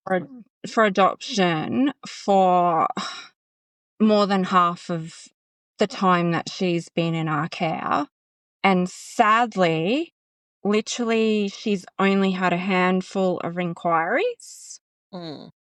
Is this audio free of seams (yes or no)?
yes